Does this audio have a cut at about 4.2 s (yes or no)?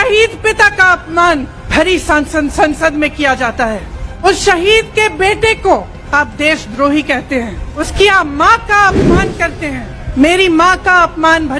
yes